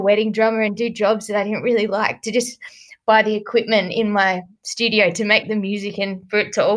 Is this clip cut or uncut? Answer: uncut